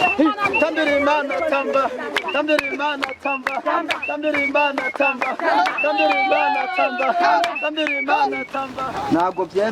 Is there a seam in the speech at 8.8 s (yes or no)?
yes